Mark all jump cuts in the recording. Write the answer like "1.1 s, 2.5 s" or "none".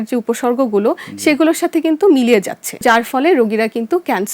2.8 s